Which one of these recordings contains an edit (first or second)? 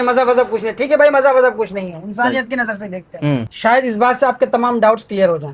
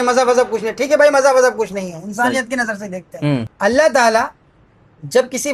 first